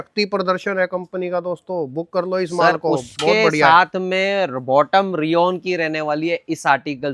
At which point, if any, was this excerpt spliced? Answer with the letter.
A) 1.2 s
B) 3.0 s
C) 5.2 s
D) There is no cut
D